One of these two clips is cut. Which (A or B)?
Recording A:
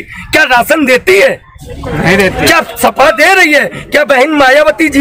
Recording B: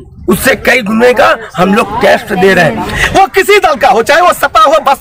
B